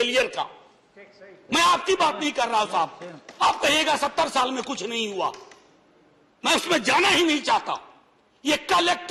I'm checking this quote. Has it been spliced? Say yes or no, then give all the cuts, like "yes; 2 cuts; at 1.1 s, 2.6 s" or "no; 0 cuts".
no; 0 cuts